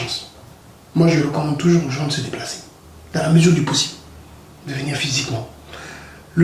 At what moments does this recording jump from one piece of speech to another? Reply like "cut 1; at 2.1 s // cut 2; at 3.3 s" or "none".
none

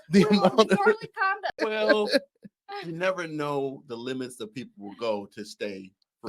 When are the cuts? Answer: cut 1; at 1.5 s

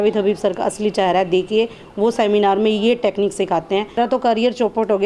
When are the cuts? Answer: cut 1; at 3.9 s

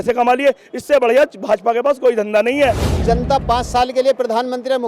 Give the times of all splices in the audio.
cut 1; at 2.9 s

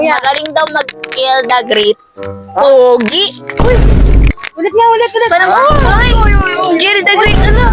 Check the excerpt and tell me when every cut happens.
none

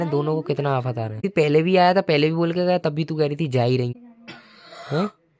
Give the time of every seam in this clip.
cut 1; at 1.2 s // cut 2; at 4.0 s

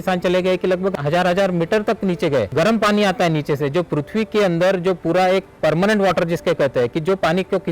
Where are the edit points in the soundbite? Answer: cut 1; at 1.0 s // cut 2; at 2.5 s

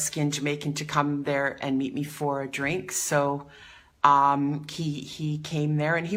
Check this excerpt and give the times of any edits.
none

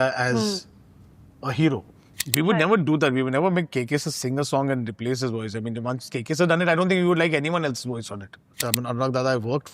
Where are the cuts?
cut 1; at 2.2 s // cut 2; at 8.5 s

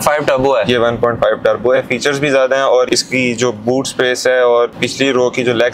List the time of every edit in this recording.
cut 1; at 1.8 s // cut 2; at 2.9 s // cut 3; at 4.7 s

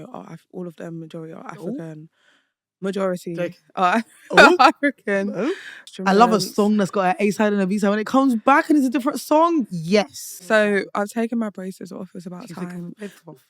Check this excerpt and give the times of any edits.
cut 1; at 5.9 s // cut 2; at 10.2 s

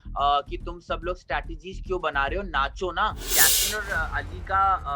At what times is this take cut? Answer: cut 1; at 3.2 s

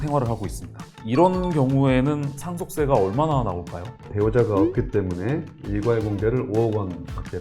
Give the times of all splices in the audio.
cut 1; at 1.0 s // cut 2; at 4.1 s

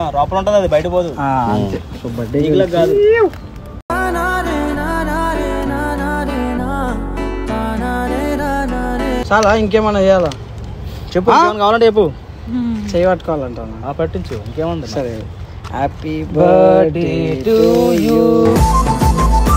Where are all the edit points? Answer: cut 1; at 9.2 s

